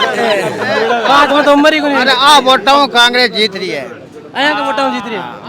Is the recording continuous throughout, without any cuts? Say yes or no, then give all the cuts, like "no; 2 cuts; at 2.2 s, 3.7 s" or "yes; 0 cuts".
yes; 0 cuts